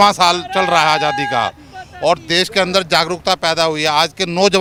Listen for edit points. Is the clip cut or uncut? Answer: uncut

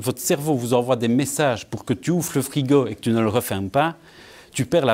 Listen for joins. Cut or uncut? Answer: uncut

